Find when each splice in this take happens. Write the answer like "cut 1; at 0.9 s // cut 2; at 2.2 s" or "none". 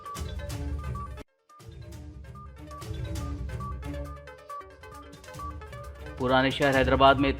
cut 1; at 0.9 s

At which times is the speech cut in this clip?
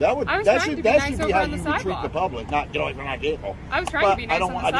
none

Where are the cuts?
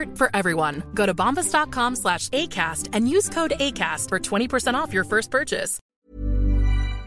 cut 1; at 5.9 s

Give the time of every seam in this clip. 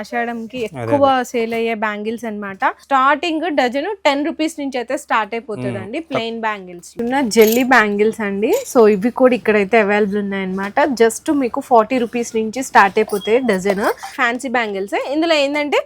cut 1; at 2.8 s // cut 2; at 6.9 s // cut 3; at 14.1 s

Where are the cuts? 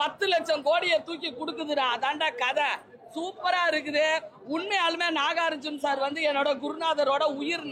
none

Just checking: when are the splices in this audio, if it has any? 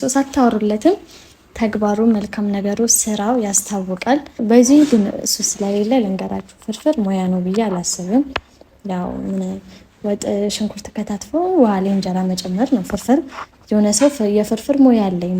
cut 1; at 4.4 s

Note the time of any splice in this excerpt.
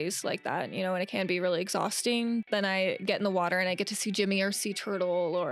cut 1; at 2.4 s

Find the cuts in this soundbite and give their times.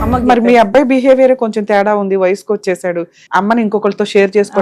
cut 1; at 3.2 s

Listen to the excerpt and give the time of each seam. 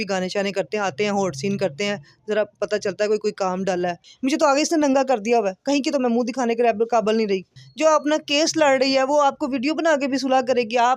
cut 1; at 4.1 s // cut 2; at 7.5 s

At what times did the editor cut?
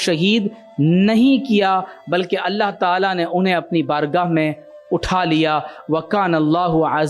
none

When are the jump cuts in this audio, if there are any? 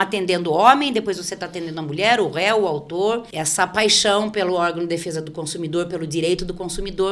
cut 1; at 3.3 s

